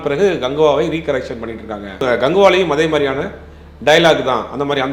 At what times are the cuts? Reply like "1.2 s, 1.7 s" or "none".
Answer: 2.1 s